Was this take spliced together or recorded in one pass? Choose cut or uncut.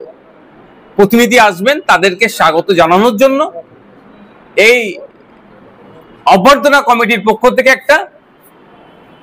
uncut